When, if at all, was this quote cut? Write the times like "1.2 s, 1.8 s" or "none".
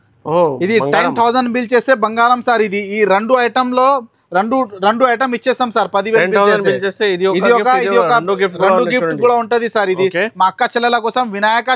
none

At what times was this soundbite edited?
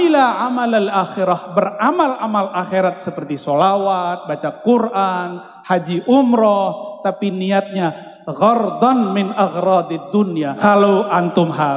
10.6 s

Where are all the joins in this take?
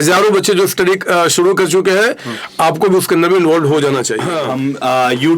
4.3 s

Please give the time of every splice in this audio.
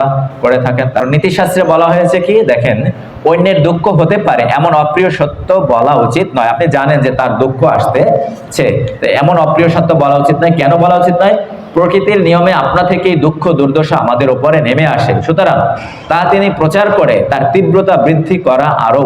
1.0 s

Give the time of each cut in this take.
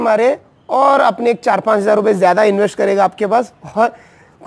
none

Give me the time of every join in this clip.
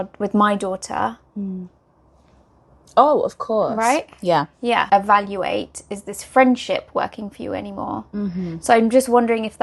4.9 s

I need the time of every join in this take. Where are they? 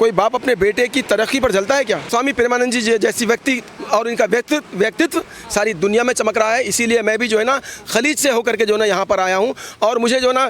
2.1 s

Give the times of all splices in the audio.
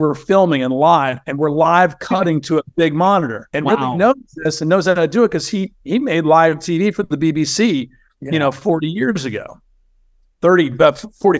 none

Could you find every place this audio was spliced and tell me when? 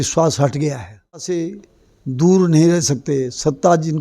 1.2 s

